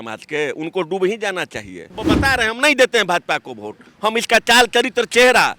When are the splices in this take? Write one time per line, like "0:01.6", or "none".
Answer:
0:01.9